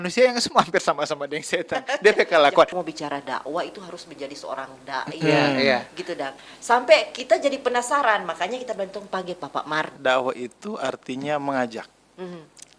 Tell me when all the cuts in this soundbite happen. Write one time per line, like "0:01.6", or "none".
0:02.8
0:09.9